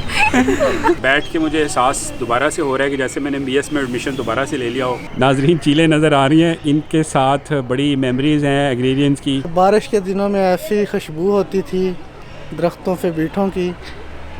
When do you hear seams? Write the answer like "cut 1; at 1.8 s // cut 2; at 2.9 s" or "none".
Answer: cut 1; at 1.0 s // cut 2; at 5.0 s // cut 3; at 9.5 s